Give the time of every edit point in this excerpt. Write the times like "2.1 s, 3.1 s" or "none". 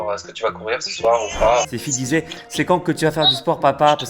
2.2 s